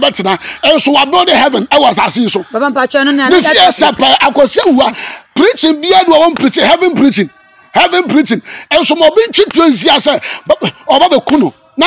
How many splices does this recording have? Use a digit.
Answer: 0